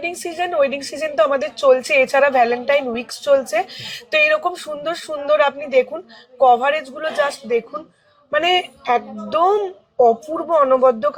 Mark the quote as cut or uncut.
uncut